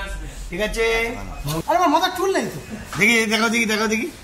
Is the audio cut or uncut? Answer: cut